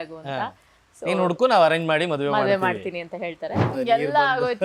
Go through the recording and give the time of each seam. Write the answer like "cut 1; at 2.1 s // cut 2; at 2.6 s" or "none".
cut 1; at 3.7 s